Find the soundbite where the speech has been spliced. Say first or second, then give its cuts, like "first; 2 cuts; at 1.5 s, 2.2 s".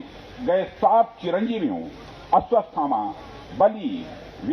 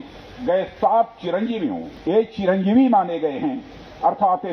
second; 1 cut; at 1.9 s